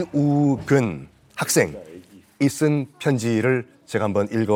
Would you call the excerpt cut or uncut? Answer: uncut